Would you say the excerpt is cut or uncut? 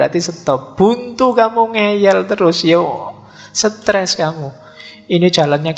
cut